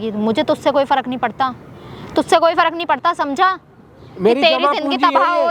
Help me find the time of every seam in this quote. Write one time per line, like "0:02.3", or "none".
none